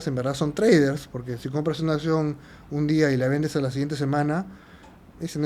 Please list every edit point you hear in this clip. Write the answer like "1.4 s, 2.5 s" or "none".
none

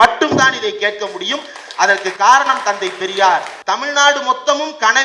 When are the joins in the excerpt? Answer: 3.5 s

